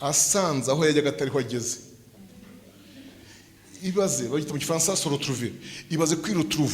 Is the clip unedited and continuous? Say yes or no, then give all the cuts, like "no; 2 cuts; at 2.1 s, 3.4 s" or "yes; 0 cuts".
yes; 0 cuts